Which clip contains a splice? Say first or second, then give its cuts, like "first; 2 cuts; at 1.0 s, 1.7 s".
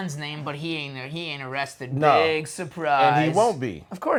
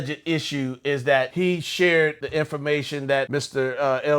second; 3 cuts; at 1.3 s, 2.2 s, 3.3 s